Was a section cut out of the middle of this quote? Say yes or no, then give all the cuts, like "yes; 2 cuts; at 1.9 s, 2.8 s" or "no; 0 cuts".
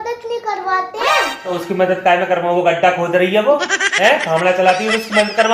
yes; 1 cut; at 1.5 s